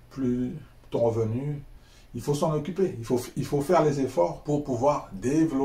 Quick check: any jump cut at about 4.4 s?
yes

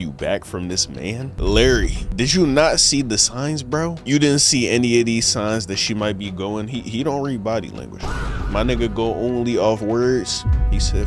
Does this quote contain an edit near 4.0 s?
yes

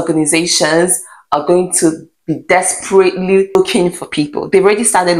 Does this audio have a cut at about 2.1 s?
no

